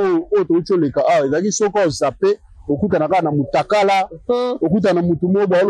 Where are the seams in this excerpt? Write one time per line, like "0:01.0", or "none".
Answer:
none